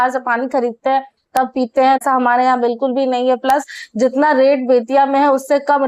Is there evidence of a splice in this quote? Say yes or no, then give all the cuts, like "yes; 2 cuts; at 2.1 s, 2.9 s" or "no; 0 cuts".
no; 0 cuts